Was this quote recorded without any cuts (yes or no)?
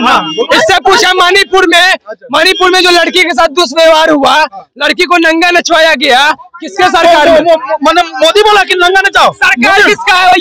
yes